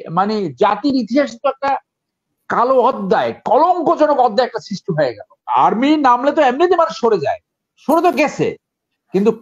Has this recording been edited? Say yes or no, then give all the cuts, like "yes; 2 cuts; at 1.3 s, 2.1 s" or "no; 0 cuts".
yes; 1 cut; at 5.3 s